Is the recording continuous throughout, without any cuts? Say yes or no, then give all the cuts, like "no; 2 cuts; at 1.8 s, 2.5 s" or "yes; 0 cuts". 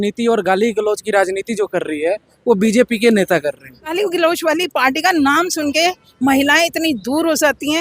no; 1 cut; at 3.9 s